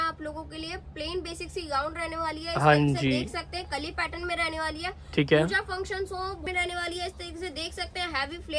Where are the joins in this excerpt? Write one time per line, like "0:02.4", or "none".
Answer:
0:06.5